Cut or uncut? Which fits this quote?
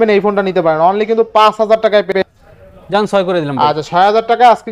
cut